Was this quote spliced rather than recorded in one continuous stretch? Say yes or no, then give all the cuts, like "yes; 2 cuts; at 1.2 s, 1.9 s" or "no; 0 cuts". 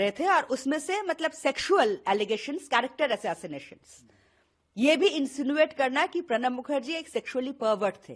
no; 0 cuts